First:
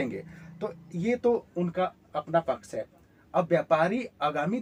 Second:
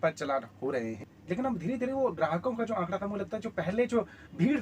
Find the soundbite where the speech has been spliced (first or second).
second